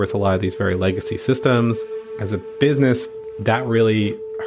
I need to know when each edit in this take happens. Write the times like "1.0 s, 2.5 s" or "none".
2.1 s

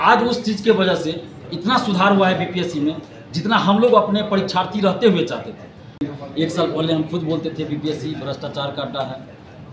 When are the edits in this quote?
6.0 s

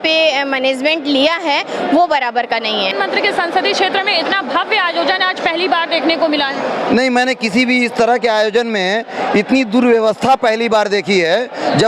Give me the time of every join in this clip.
2.9 s

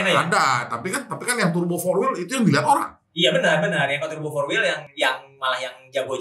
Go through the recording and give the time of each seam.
4.9 s

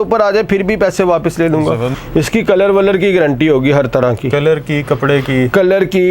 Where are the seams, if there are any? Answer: 1.9 s

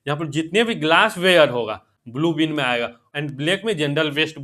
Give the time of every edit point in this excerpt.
1.9 s, 3.0 s

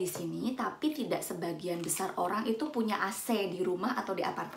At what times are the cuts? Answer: none

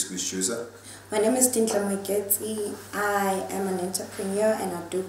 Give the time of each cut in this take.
1.4 s

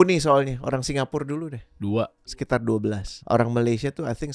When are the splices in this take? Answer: 2.4 s, 3.2 s

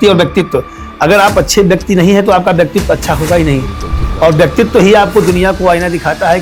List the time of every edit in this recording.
none

